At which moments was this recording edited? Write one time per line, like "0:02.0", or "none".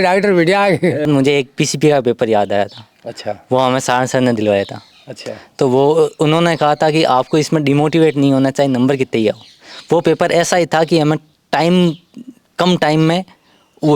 0:01.1

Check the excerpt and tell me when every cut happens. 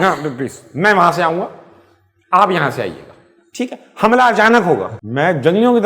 0:04.9

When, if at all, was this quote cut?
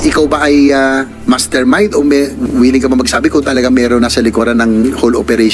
0:01.1

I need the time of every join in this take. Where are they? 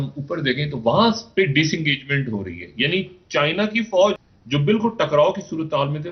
0:04.2

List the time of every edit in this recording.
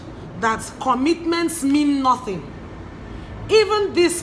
none

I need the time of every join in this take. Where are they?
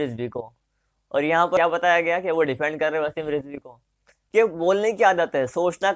0:01.6
0:04.1

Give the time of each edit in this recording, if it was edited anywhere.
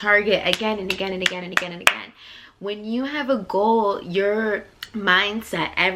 0:04.8

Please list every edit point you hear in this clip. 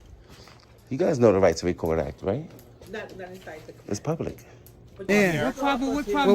0:05.1

